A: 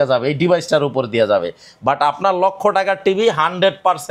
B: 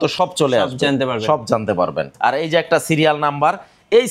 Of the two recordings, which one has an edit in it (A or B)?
B